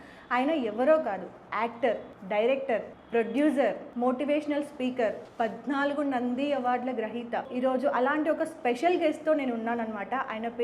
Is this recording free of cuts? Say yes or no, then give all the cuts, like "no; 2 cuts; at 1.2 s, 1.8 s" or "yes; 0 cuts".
no; 5 cuts; at 2.1 s, 3.0 s, 3.9 s, 5.2 s, 7.5 s